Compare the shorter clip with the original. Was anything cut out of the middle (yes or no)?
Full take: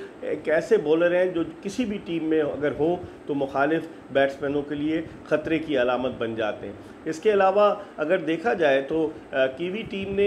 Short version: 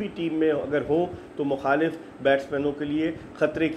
no